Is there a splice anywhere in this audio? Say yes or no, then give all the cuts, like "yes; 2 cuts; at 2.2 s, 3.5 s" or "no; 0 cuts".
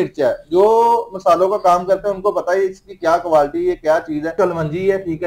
yes; 1 cut; at 4.4 s